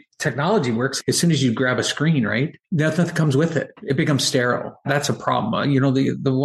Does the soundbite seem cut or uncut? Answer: cut